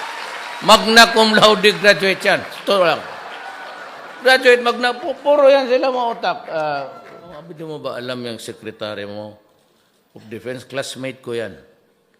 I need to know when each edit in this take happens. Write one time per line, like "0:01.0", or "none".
0:07.5

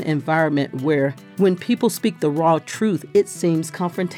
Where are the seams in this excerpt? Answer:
0:01.2

